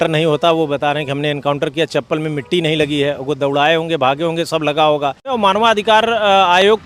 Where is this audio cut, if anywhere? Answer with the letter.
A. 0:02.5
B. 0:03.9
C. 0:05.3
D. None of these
C